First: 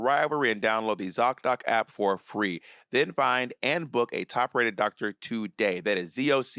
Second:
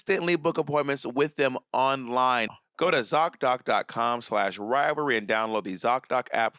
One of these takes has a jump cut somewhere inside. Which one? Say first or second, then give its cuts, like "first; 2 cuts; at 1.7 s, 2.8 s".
second; 1 cut; at 2.4 s